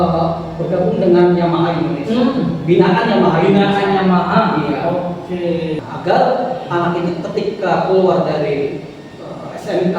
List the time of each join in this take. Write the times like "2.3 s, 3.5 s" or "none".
5.8 s